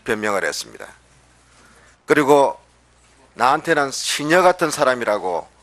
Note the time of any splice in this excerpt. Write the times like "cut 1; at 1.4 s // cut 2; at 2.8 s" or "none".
cut 1; at 4.0 s